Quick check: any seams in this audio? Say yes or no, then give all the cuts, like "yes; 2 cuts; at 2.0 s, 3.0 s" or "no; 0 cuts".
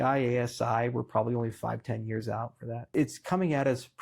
yes; 1 cut; at 2.9 s